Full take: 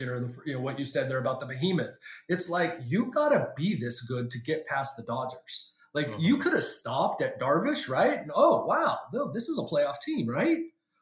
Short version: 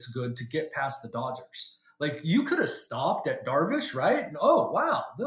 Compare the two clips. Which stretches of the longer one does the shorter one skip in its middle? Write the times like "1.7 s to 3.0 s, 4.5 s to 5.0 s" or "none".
none